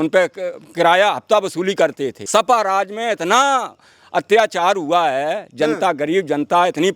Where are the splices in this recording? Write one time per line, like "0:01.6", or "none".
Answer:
0:02.1